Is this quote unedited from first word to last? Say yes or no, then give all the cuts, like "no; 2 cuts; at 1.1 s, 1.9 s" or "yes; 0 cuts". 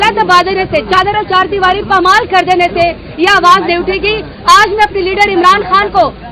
yes; 0 cuts